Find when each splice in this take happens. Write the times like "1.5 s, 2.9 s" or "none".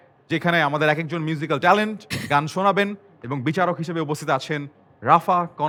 none